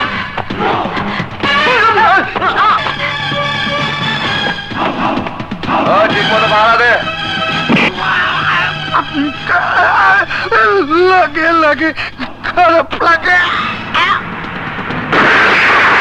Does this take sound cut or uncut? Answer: uncut